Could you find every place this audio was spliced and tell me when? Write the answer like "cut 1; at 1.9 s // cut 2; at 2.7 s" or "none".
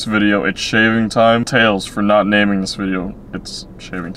none